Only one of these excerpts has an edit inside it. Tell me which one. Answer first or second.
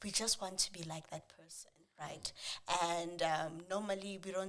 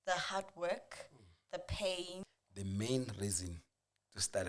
second